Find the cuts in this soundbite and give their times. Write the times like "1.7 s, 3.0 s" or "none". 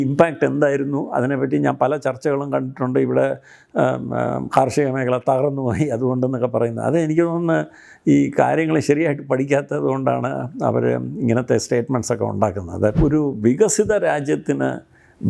12.9 s